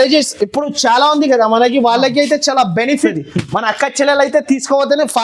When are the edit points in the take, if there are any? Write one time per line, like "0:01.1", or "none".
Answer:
0:03.1